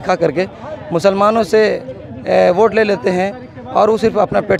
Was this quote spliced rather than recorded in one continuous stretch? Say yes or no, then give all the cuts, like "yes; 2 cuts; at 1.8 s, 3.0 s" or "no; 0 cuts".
no; 0 cuts